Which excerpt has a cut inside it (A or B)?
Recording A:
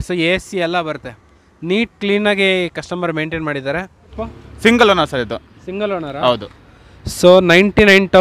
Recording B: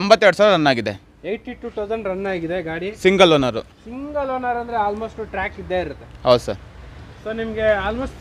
A